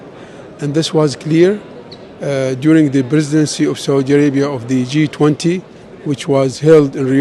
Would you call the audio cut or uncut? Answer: uncut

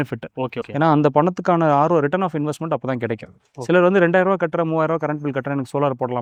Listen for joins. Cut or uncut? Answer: uncut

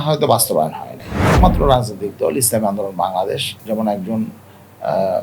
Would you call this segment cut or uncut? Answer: cut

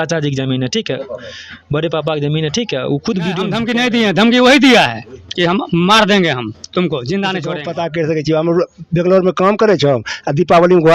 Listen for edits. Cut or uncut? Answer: cut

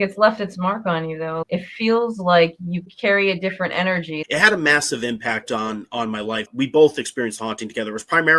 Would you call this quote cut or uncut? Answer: cut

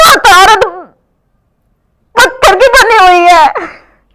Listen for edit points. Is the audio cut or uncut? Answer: uncut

